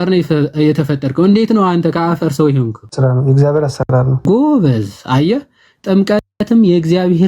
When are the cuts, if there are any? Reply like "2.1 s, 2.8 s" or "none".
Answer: 2.8 s, 4.2 s